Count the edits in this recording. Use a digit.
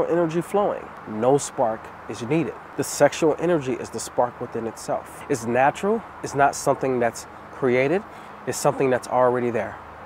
3